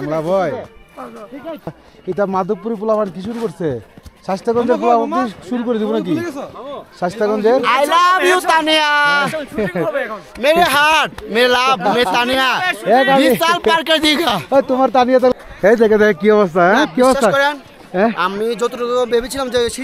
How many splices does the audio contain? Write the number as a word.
two